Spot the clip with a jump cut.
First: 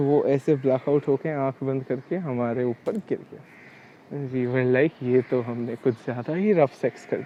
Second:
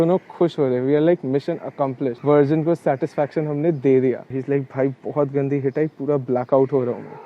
second; 2 cuts; at 2.2 s, 4.3 s

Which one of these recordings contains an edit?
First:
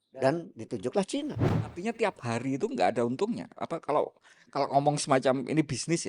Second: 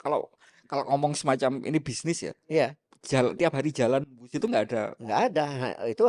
first; 1 cut; at 1.8 s

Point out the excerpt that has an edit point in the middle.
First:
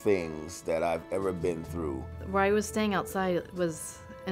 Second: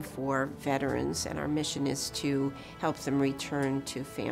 first; 1 cut; at 2.1 s

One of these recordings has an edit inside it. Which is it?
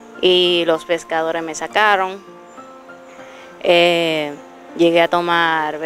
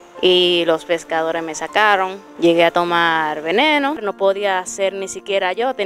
second; 2 cuts; at 2.2 s, 4.1 s

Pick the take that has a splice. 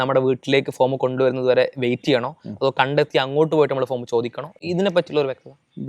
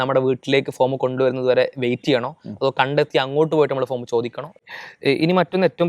second; 1 cut; at 4.6 s

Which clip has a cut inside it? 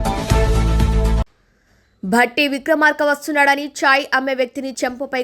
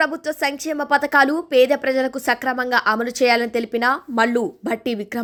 first; 1 cut; at 1.2 s

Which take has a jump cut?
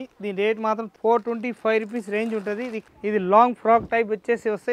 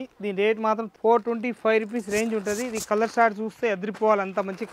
first; 1 cut; at 2.8 s

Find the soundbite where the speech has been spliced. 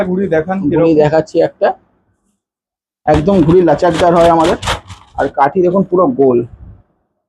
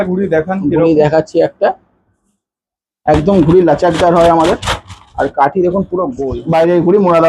second; 1 cut; at 6.2 s

